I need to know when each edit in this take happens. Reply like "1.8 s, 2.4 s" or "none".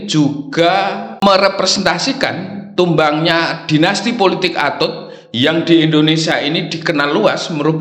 1.2 s